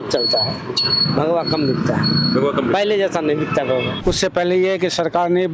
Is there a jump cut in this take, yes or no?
yes